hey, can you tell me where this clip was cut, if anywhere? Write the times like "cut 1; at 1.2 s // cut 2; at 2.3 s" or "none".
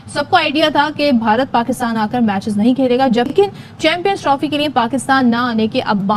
none